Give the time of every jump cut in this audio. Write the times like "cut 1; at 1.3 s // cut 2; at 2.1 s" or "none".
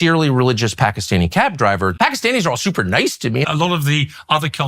cut 1; at 1.9 s // cut 2; at 3.4 s

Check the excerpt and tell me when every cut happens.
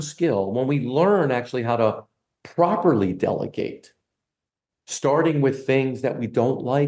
none

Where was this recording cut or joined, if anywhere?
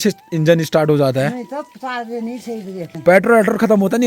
cut 1; at 2.9 s

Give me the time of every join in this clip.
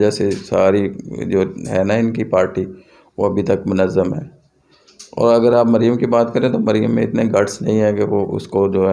none

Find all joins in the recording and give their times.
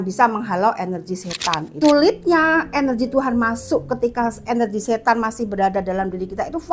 cut 1; at 1.7 s

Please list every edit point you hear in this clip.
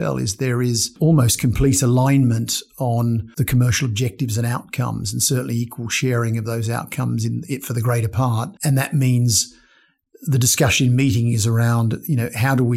cut 1; at 0.9 s // cut 2; at 3.3 s // cut 3; at 8.5 s

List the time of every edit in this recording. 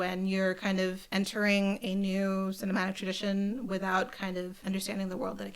cut 1; at 1.0 s // cut 2; at 4.6 s

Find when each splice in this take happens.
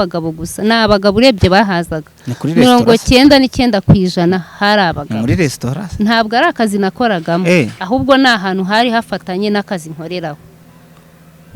none

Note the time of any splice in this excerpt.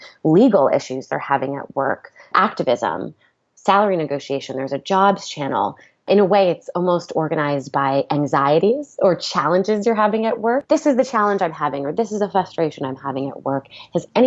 cut 1; at 2.3 s // cut 2; at 5.9 s // cut 3; at 10.6 s

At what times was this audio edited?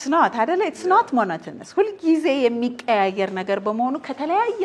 none

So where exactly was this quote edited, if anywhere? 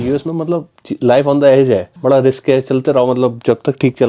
cut 1; at 1.9 s

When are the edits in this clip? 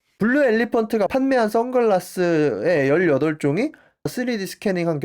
cut 1; at 4.1 s

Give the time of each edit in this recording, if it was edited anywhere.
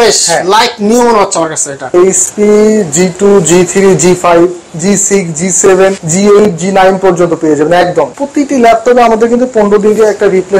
cut 1; at 2.0 s // cut 2; at 6.0 s // cut 3; at 8.2 s

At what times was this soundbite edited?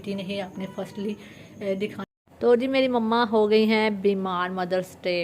cut 1; at 2.0 s

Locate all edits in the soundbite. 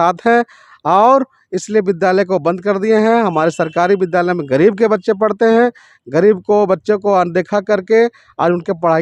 none

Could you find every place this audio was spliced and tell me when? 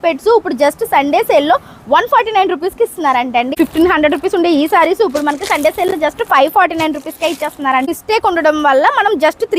cut 1; at 3.5 s // cut 2; at 7.9 s

